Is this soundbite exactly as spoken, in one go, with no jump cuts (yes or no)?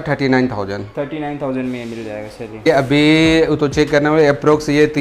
no